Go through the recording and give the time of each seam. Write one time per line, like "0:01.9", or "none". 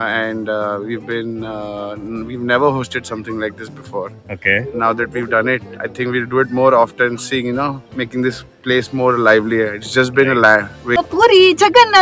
0:11.0